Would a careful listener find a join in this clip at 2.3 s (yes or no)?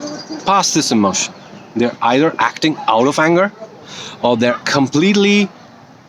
no